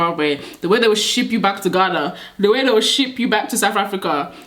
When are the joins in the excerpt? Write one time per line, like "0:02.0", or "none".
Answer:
none